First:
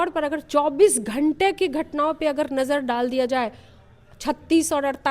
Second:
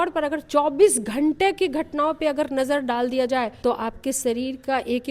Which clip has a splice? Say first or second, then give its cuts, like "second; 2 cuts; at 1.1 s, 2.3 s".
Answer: second; 1 cut; at 3.5 s